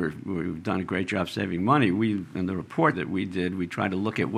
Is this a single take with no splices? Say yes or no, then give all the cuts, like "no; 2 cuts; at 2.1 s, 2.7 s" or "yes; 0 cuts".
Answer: no; 1 cut; at 3.0 s